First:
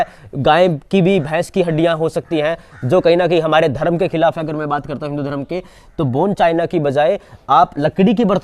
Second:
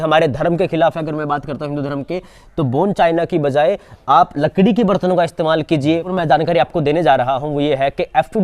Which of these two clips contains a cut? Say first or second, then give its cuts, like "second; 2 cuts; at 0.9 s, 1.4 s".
second; 1 cut; at 6.1 s